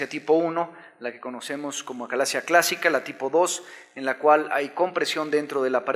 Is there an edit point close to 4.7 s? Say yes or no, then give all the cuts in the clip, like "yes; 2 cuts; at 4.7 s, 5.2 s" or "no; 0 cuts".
no; 1 cut; at 1.8 s